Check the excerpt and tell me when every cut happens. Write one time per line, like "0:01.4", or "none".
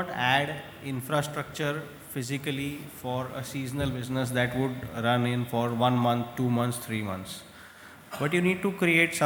none